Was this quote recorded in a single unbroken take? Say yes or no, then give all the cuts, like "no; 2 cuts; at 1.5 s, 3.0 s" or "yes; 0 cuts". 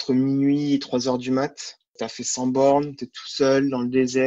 no; 1 cut; at 2.0 s